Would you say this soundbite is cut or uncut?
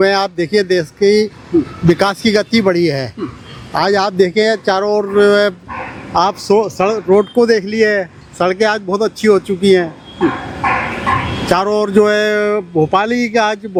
uncut